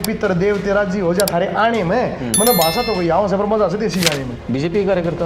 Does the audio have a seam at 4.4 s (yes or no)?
yes